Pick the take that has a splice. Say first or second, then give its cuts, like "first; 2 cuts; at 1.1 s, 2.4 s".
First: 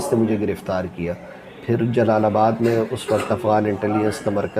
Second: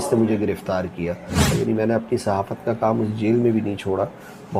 second; 1 cut; at 1.5 s